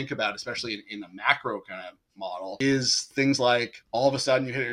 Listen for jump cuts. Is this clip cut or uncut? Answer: cut